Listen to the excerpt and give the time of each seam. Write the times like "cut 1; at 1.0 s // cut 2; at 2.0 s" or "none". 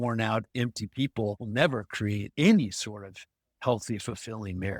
cut 1; at 1.4 s // cut 2; at 2.2 s